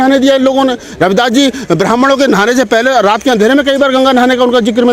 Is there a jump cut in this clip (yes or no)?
no